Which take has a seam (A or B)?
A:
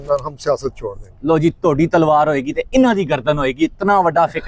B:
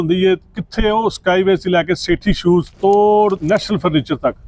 B